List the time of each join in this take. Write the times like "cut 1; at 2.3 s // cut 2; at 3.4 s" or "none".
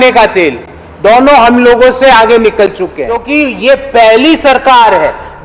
cut 1; at 3.1 s